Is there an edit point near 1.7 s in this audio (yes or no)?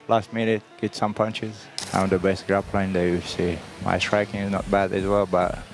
yes